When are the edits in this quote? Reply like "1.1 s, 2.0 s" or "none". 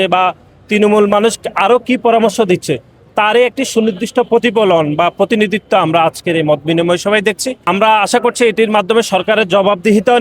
7.5 s